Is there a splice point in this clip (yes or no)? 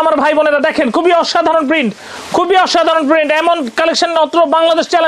no